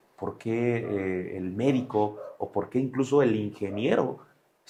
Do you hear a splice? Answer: no; 0 cuts

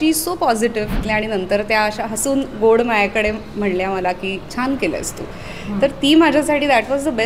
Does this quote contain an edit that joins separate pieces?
yes; 1 cut; at 1.0 s

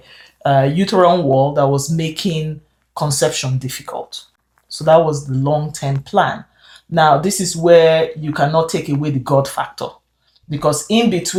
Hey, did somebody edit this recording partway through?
no; 0 cuts

